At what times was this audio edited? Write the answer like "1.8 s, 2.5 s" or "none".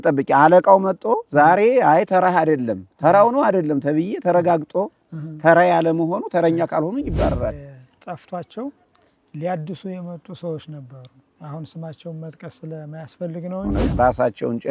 7.7 s, 14.0 s